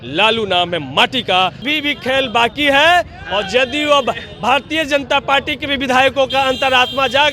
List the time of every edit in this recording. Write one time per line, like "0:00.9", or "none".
0:01.6